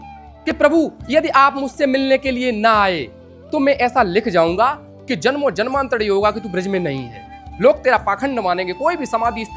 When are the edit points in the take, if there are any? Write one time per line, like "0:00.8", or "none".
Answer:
none